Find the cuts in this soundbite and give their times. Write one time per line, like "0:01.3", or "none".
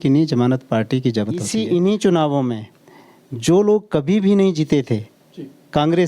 0:01.5

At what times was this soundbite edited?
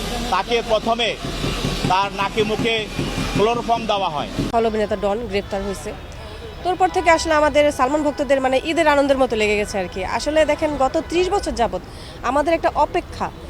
0:04.5

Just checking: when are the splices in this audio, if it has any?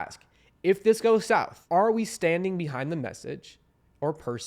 0:01.6

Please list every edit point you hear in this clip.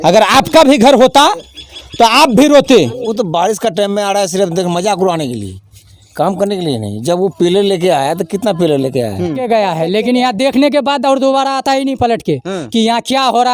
0:03.0
0:09.4

